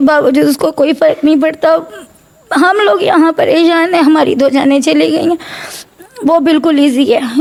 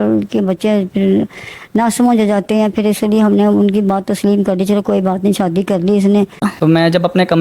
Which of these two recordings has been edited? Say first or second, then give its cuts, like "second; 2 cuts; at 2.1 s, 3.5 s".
second; 1 cut; at 6.4 s